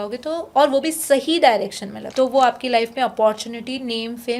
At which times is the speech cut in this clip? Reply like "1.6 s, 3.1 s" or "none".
2.0 s